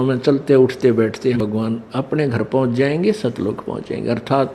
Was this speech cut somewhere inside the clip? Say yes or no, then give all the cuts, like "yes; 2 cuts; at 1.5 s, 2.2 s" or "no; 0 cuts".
yes; 1 cut; at 1.4 s